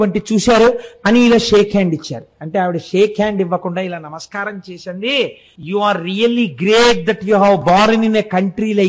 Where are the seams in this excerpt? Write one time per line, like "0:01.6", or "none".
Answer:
0:05.5